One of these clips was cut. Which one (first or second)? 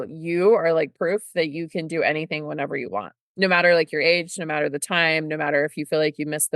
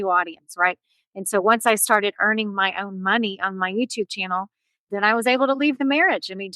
second